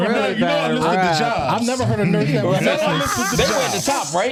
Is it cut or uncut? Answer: uncut